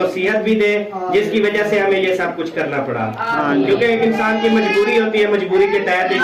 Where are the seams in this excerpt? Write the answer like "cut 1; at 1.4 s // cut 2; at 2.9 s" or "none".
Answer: none